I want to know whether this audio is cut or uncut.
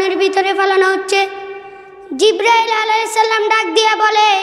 uncut